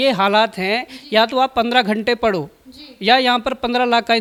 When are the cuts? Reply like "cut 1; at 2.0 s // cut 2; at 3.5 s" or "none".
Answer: none